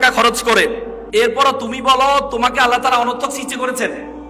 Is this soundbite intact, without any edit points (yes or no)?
no